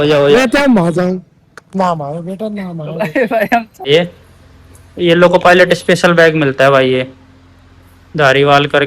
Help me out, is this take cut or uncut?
cut